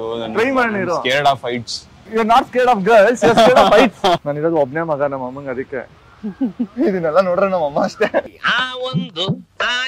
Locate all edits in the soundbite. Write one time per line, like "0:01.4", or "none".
0:04.2
0:08.3